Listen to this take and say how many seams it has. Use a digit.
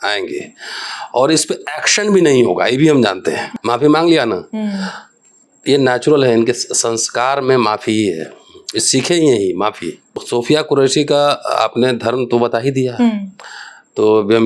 2